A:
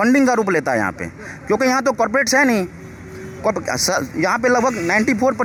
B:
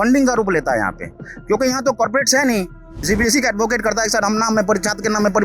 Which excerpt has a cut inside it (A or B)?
B